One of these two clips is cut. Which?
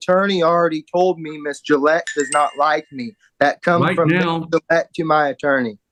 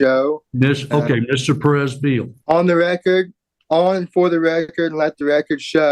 second; 1 cut; at 2.3 s

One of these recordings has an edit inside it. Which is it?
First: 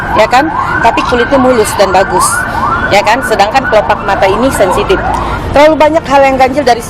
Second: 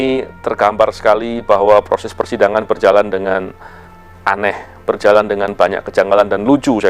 first; 1 cut; at 5.3 s

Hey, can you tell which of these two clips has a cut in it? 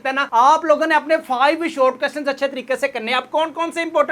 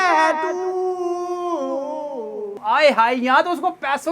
second; 1 cut; at 2.5 s

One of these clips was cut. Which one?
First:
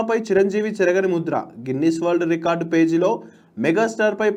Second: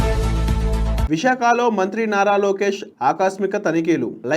second; 1 cut; at 1.0 s

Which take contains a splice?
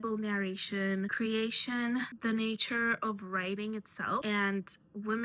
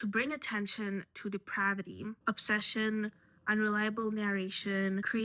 second; 1 cut; at 2.2 s

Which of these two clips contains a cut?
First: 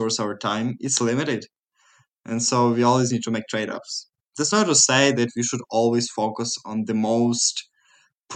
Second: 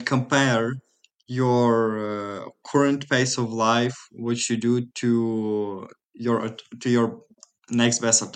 first; 1 cut; at 4.3 s

